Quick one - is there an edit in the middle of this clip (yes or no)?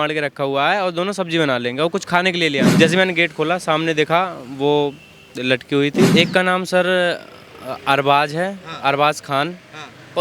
yes